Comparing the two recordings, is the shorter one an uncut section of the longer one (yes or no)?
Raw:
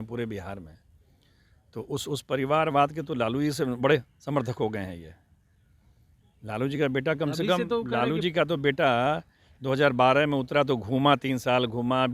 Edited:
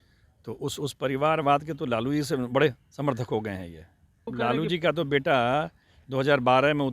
no